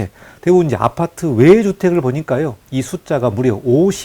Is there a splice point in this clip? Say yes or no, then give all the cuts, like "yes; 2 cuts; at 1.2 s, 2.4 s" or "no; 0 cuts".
yes; 1 cut; at 2.6 s